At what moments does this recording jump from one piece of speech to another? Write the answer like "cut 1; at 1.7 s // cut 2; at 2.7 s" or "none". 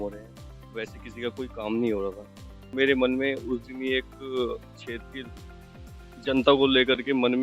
cut 1; at 2.6 s